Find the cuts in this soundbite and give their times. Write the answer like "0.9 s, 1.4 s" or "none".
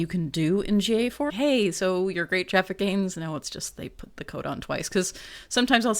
1.3 s